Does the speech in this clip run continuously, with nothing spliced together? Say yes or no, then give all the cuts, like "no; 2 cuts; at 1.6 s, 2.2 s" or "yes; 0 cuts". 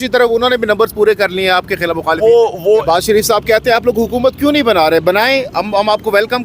no; 1 cut; at 2.8 s